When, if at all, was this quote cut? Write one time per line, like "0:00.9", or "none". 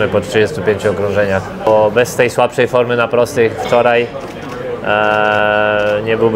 0:01.7